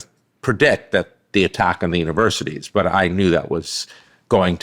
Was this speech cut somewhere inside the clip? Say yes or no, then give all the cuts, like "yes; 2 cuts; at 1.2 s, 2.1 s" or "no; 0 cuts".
no; 0 cuts